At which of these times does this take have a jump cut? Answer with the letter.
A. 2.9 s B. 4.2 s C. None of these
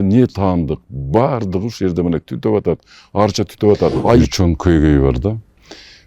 B